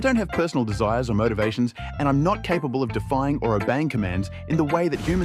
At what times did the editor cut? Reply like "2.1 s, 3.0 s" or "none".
none